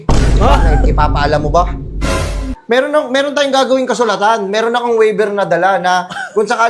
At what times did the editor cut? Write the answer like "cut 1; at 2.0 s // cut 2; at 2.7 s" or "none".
cut 1; at 2.5 s